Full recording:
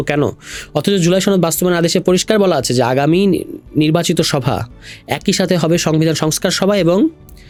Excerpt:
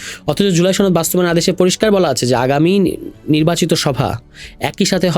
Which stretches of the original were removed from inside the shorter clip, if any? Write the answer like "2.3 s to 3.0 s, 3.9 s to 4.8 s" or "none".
none